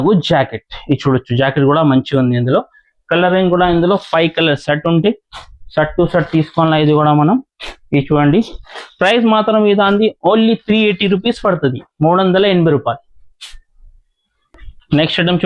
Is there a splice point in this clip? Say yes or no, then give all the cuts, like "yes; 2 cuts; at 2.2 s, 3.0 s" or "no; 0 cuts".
no; 0 cuts